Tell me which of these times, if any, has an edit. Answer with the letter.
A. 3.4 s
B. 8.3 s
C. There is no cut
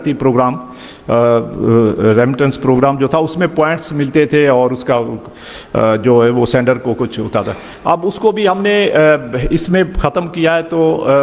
C